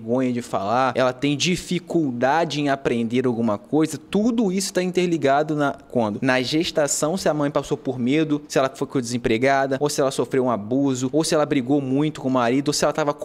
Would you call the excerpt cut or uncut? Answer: cut